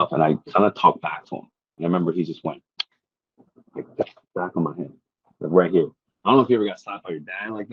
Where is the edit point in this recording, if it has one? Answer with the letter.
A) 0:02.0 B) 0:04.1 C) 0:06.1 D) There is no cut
D